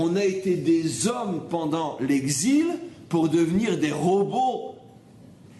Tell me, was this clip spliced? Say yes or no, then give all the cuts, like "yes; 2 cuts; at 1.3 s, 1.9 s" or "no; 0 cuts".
no; 0 cuts